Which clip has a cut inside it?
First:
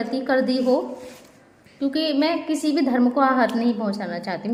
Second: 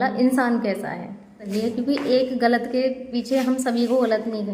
second; 1 cut; at 1.4 s

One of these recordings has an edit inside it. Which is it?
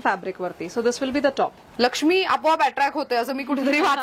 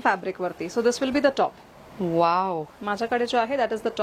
first; 1 cut; at 1.6 s

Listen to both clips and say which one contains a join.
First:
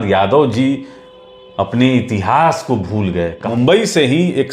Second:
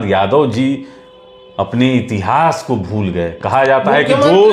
first; 1 cut; at 3.5 s

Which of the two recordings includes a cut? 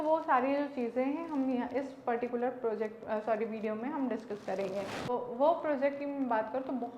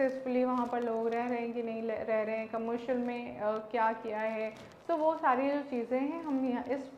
first; 1 cut; at 5.1 s

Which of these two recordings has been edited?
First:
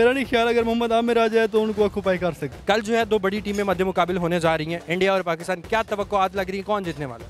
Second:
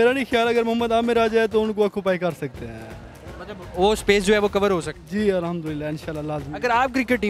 first; 1 cut; at 2.5 s

